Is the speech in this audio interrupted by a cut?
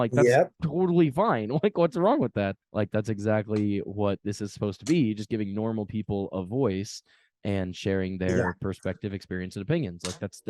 no; 0 cuts

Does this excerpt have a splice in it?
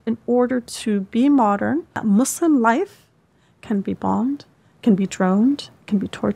yes; 1 cut; at 1.9 s

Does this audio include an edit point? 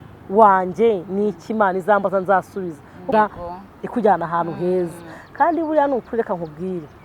yes; 1 cut; at 3.1 s

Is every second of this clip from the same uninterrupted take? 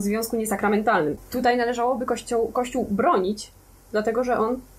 no; 1 cut; at 1.2 s

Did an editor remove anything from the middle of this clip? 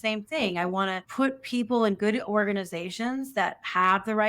yes; 1 cut; at 1.0 s

